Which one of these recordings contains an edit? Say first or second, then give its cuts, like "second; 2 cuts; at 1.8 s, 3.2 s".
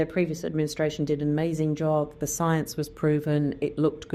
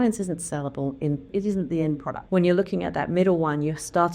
second; 2 cuts; at 1.3 s, 2.2 s